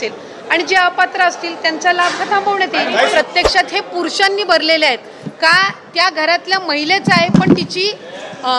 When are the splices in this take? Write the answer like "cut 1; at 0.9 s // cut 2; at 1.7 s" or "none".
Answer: cut 1; at 3.1 s